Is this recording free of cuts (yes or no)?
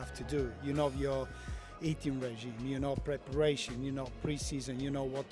yes